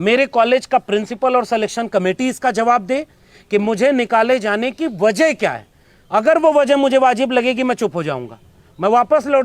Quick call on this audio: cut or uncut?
uncut